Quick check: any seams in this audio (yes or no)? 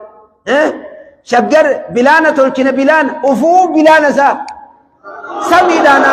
no